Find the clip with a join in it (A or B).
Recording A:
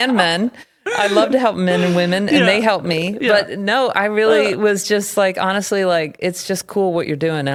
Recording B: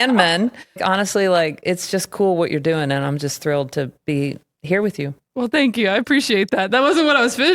B